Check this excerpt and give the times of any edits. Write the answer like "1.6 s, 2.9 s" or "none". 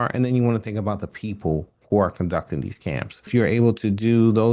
3.3 s